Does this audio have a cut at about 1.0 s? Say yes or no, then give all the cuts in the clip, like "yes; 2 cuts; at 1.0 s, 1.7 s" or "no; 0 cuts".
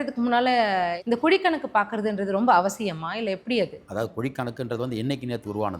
yes; 2 cuts; at 1.0 s, 3.8 s